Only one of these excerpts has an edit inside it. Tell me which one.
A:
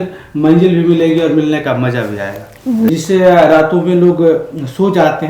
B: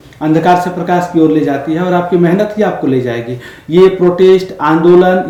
A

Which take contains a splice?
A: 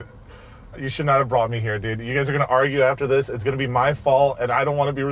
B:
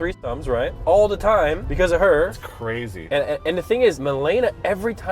B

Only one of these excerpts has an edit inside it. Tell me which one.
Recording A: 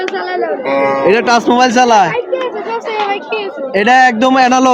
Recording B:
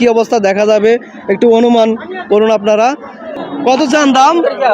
B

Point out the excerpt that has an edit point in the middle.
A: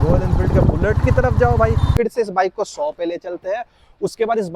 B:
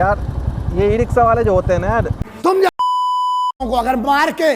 A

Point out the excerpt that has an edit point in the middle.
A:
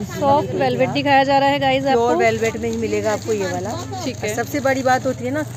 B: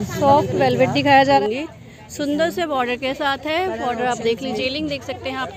B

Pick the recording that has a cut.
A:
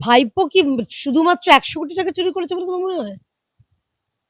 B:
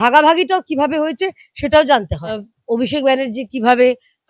B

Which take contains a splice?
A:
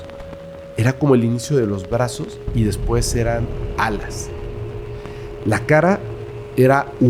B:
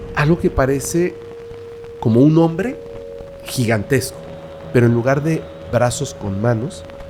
B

